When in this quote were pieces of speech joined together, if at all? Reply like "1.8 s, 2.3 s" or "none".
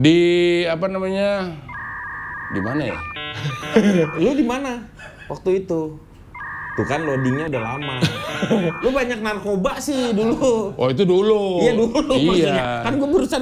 none